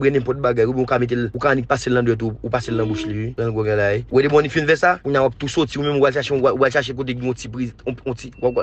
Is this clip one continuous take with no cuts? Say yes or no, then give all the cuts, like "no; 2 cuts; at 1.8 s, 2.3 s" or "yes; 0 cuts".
no; 4 cuts; at 1.3 s, 3.3 s, 4.0 s, 5.0 s